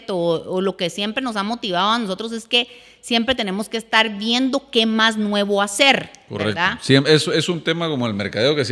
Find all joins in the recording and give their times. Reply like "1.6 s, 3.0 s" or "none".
none